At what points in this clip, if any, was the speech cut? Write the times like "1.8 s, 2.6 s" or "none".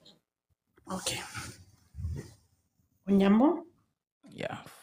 1.1 s